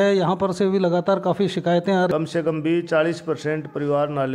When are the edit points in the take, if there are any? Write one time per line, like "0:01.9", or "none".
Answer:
0:02.1